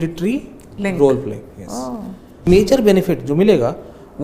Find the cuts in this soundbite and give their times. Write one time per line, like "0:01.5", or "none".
0:02.5